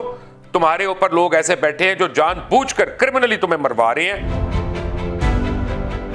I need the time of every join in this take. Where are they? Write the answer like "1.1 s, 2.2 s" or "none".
4.3 s